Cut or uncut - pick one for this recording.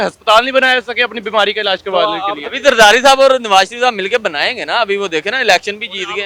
uncut